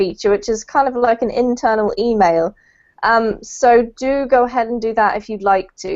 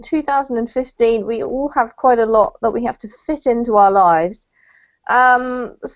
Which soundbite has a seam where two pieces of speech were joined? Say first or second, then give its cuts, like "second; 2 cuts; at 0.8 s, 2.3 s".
first; 1 cut; at 3.9 s